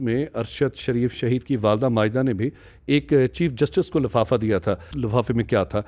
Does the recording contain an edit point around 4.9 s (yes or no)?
yes